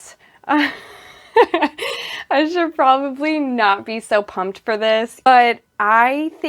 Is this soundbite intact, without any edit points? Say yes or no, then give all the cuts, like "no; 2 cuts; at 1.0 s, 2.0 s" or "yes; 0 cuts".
no; 1 cut; at 5.3 s